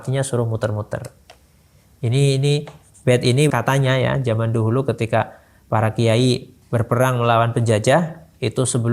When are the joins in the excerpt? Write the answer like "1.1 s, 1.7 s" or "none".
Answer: 3.5 s